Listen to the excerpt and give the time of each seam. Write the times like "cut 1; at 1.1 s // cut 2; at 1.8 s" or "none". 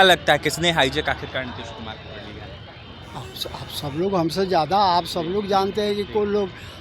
none